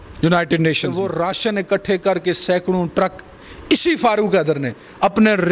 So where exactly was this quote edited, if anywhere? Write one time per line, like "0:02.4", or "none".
0:01.0